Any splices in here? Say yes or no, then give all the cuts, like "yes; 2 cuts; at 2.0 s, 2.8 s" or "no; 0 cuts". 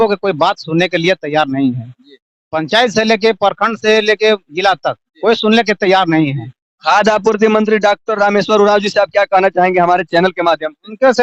no; 0 cuts